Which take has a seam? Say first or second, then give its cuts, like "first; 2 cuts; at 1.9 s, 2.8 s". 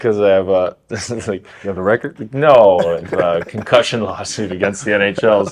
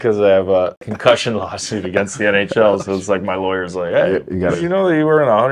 second; 2 cuts; at 0.9 s, 4.6 s